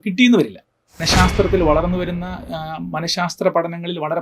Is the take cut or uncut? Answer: cut